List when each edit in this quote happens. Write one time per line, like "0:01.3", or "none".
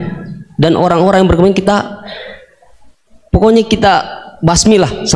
none